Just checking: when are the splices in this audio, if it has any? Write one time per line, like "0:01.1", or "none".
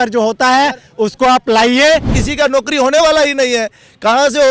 0:02.1